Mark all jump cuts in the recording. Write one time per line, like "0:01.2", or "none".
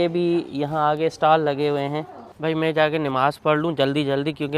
0:02.2